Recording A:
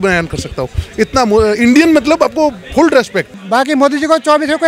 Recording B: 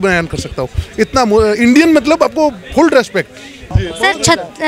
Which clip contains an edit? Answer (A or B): A